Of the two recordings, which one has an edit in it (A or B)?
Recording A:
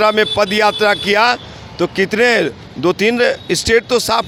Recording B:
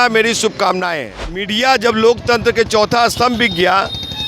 B